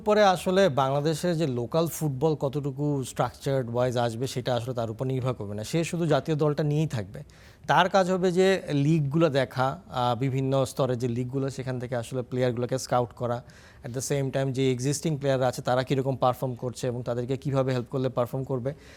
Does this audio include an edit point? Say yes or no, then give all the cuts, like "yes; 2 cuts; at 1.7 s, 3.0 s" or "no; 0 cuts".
no; 0 cuts